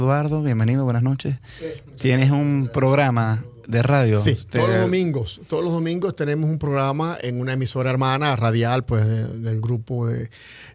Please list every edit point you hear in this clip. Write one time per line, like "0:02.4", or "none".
0:05.0